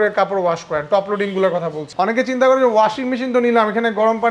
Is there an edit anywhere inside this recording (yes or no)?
yes